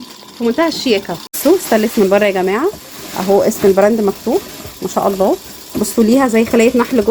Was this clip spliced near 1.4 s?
yes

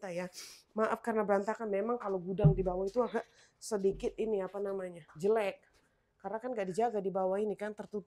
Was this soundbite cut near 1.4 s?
no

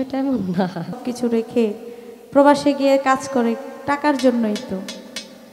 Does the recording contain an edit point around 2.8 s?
no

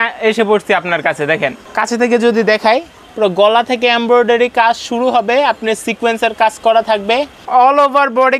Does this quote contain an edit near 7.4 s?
yes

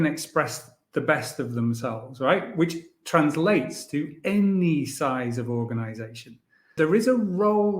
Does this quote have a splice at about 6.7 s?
yes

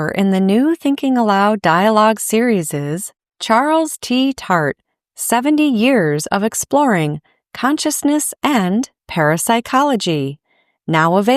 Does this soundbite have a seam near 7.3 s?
no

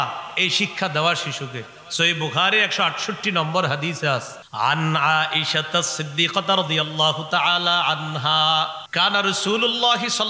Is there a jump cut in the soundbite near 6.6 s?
no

